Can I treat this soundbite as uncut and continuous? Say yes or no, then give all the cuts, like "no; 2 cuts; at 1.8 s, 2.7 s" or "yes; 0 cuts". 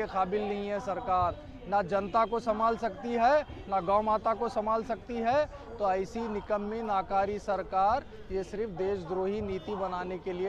yes; 0 cuts